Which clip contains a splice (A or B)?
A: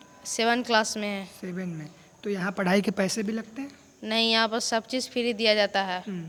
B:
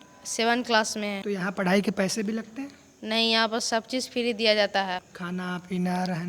B